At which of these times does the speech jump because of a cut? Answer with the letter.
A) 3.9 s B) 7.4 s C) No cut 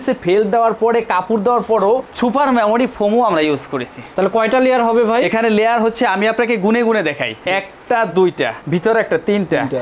C